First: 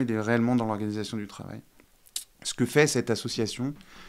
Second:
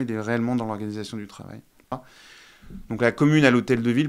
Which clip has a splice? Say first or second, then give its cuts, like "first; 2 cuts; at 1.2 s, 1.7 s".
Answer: second; 1 cut; at 1.9 s